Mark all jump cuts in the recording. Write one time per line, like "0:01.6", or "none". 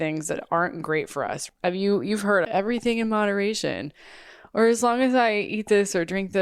0:01.4
0:02.4

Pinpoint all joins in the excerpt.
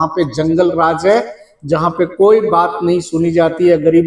none

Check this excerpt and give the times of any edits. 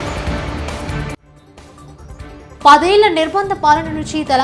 0:02.6

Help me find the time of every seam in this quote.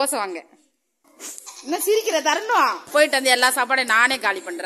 0:02.9

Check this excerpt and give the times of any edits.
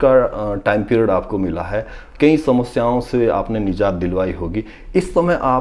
none

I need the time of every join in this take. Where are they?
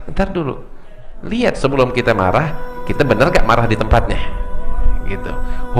0:01.1

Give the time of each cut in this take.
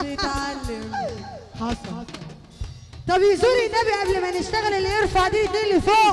0:01.4

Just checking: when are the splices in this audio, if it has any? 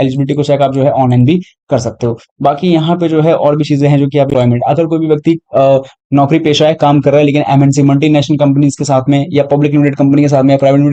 0:04.3

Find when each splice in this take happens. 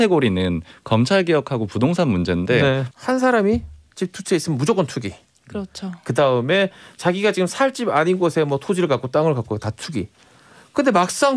0:02.9

